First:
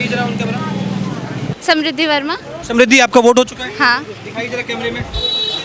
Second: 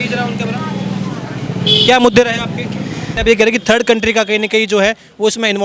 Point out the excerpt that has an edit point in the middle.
first; 1 cut; at 1.5 s

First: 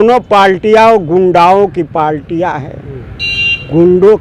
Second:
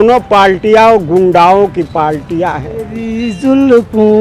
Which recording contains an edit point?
second; 1 cut; at 3.1 s

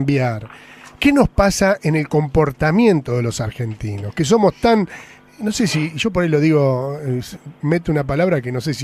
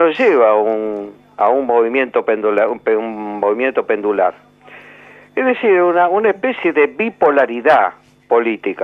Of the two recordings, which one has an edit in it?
first; 1 cut; at 6.4 s

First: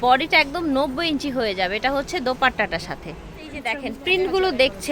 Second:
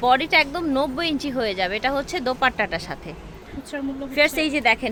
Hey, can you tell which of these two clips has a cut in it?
first; 1 cut; at 3.9 s

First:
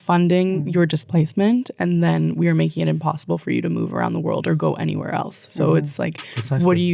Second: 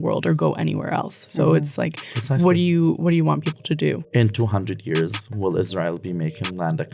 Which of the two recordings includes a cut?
second; 1 cut; at 4.0 s

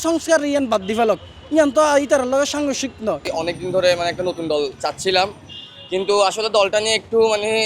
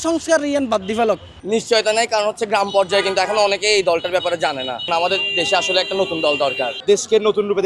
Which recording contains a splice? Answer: second; 3 cuts; at 1.3 s, 4.9 s, 6.7 s

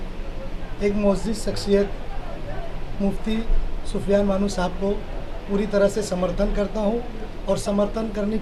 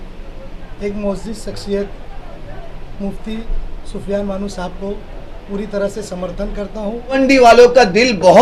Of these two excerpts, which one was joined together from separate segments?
second; 1 cut; at 7.2 s

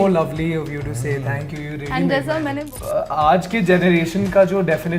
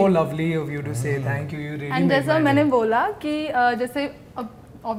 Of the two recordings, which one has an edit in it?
first; 1 cut; at 2.6 s

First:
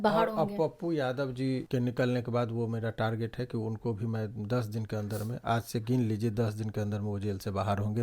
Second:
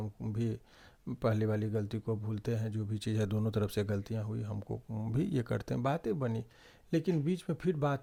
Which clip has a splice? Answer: first; 1 cut; at 1.7 s

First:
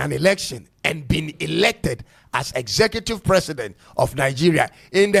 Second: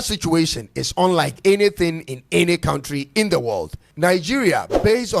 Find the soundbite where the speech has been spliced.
second; 1 cut; at 3.8 s

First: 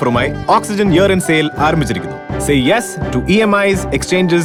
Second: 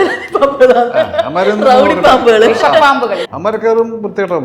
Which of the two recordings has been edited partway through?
second; 1 cut; at 3.3 s

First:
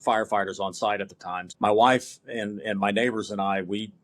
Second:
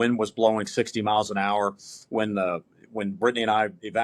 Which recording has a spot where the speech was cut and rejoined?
first; 1 cut; at 1.4 s

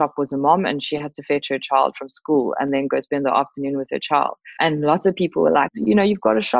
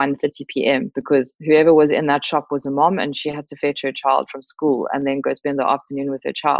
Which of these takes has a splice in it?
second; 1 cut; at 0.9 s

